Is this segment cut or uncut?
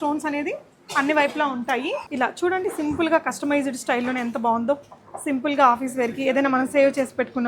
cut